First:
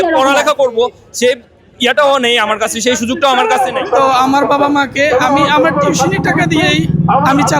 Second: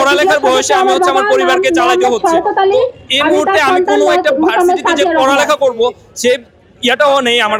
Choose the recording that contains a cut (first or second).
first